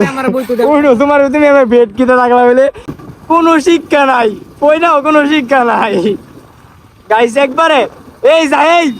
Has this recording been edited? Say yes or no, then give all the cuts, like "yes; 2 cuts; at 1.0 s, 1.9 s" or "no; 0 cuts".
yes; 1 cut; at 2.9 s